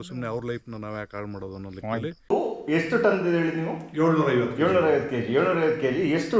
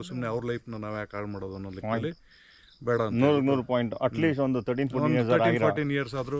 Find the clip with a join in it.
first; 1 cut; at 2.3 s

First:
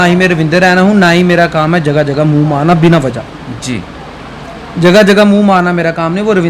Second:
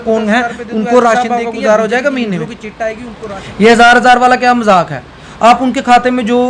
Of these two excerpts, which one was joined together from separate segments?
second; 1 cut; at 1.2 s

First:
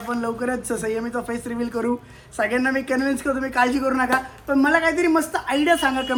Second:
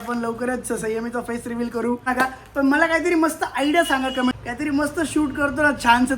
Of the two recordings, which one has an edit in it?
second; 2 cuts; at 2.1 s, 4.3 s

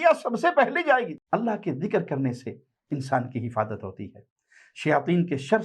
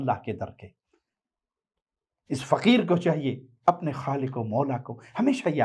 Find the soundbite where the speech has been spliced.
first; 1 cut; at 1.1 s

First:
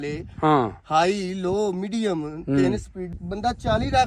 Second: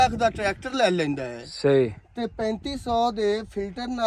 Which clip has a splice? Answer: first; 1 cut; at 3.1 s

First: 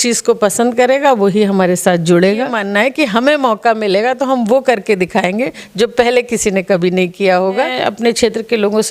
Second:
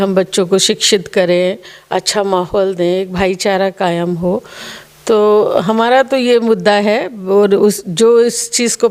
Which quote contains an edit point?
first; 2 cuts; at 2.6 s, 7.7 s

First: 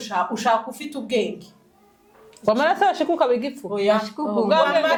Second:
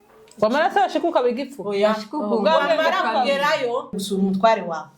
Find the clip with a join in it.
second; 1 cut; at 4.0 s

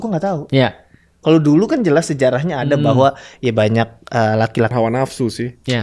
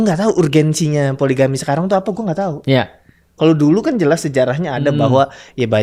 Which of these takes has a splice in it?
first; 1 cut; at 4.7 s

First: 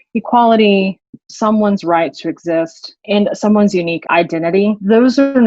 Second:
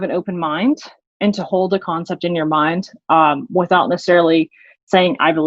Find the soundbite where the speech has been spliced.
first; 3 cuts; at 1.1 s, 3.0 s, 4.2 s

